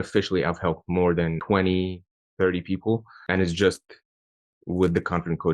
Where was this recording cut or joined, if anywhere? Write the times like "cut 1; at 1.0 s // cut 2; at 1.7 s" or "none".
cut 1; at 1.4 s // cut 2; at 3.1 s